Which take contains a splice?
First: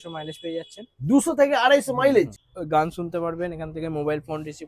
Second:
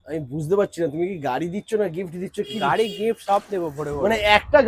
first; 1 cut; at 2.5 s

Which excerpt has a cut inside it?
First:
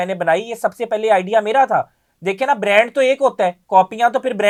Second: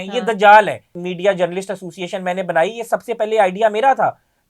second; 1 cut; at 1.0 s

